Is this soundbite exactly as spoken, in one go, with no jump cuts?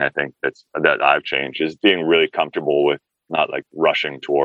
no; 2 cuts; at 1.7 s, 3.4 s

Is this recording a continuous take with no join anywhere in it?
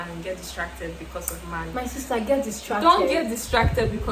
yes; 0 cuts

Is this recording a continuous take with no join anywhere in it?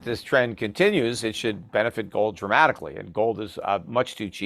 yes; 0 cuts

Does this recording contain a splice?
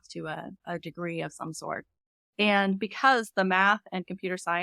no; 0 cuts

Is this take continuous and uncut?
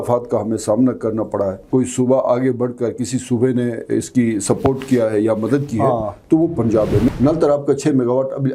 no; 2 cuts; at 1.6 s, 7.1 s

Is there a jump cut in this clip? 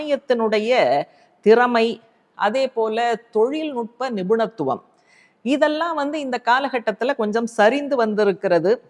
no; 0 cuts

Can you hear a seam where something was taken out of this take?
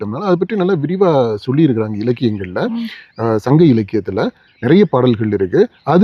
no; 0 cuts

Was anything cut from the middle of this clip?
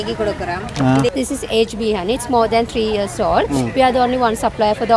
yes; 1 cut; at 1.1 s

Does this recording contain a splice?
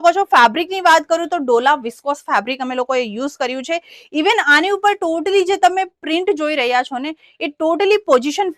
no; 0 cuts

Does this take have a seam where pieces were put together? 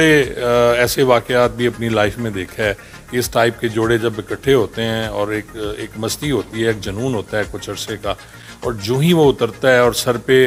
no; 0 cuts

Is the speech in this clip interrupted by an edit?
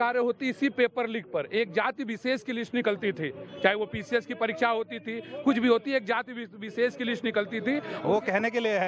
yes; 1 cut; at 7.9 s

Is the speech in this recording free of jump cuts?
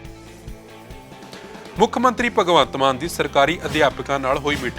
no; 1 cut; at 1.0 s

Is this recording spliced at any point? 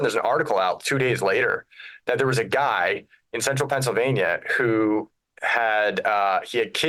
no; 0 cuts

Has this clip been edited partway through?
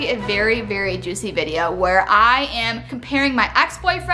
no; 0 cuts

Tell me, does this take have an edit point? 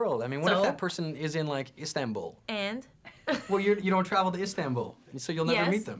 no; 0 cuts

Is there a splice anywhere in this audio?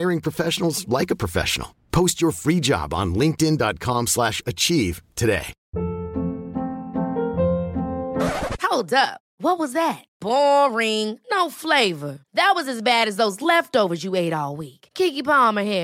yes; 1 cut; at 5.6 s

